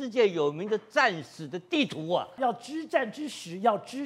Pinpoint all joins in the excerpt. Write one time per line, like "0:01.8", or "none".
0:02.4